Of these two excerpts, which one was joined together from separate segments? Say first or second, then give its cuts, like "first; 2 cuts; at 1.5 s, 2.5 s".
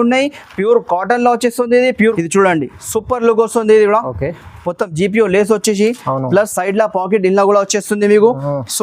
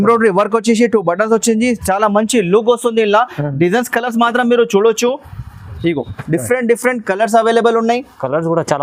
first; 1 cut; at 2.2 s